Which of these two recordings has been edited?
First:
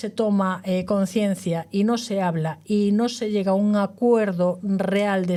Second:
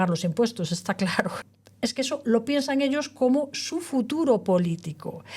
second; 1 cut; at 1.4 s

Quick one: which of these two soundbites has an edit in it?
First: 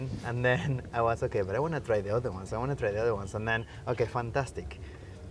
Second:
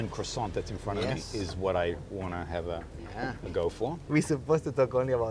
second; 1 cut; at 4.1 s

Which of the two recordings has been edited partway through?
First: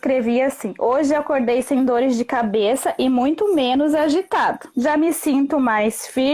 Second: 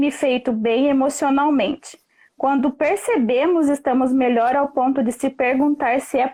first; 1 cut; at 4.7 s

